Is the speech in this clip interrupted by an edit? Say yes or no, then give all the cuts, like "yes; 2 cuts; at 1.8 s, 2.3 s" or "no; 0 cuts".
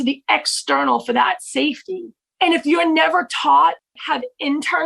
yes; 2 cuts; at 2.1 s, 3.8 s